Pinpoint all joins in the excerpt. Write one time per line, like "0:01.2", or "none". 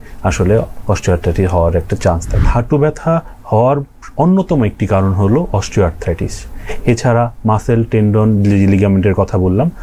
0:02.5